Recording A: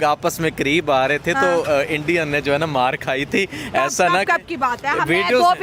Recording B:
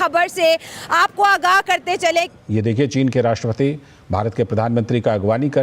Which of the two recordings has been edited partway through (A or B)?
B